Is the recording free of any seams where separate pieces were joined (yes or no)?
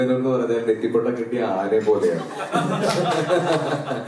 yes